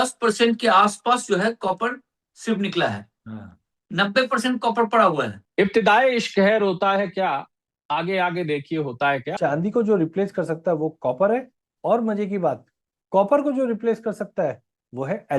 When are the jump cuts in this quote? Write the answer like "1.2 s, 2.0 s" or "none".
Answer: 5.4 s, 9.3 s